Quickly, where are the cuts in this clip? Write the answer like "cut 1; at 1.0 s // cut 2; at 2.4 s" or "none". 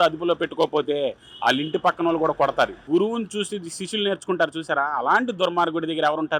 cut 1; at 2.8 s